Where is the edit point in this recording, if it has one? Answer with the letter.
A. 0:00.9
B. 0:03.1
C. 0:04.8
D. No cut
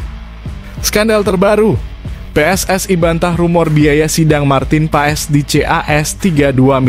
A